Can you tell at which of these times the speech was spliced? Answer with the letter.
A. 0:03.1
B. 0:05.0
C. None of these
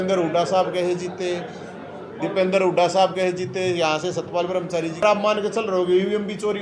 B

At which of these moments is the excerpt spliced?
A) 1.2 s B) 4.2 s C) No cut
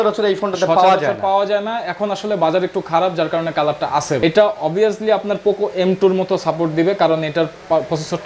B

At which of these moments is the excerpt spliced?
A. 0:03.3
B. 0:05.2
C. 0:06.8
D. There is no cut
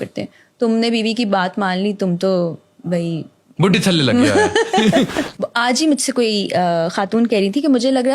B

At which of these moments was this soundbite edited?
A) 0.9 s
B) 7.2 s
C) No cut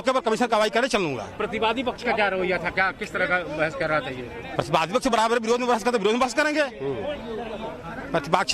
B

